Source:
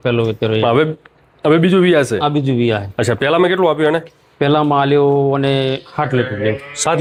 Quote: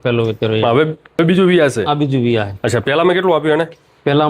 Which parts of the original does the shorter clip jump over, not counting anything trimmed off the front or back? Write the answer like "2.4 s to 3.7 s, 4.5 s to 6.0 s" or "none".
1.2 s to 1.5 s